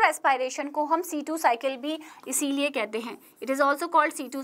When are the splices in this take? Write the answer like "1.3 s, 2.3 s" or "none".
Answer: none